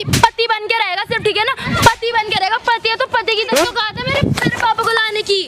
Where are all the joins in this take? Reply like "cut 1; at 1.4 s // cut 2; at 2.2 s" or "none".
cut 1; at 3.5 s